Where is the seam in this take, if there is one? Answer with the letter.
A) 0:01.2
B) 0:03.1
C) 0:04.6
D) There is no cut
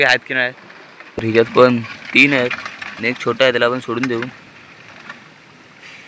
A